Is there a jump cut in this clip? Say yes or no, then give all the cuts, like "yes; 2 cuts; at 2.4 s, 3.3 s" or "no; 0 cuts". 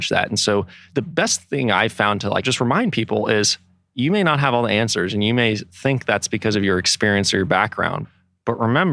yes; 2 cuts; at 2.5 s, 8.0 s